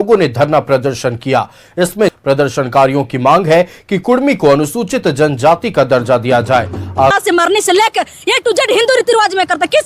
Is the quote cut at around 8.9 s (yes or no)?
no